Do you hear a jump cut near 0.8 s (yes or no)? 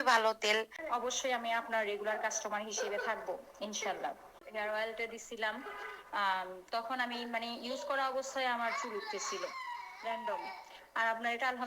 yes